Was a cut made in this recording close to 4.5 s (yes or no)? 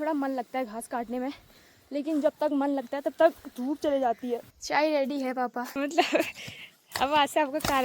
yes